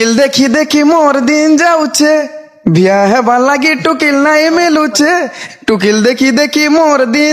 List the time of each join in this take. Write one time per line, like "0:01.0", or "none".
none